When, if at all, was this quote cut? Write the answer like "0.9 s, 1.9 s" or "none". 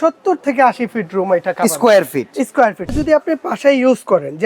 2.9 s